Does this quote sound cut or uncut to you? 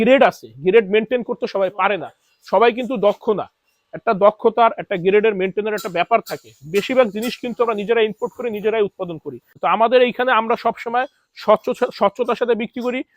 cut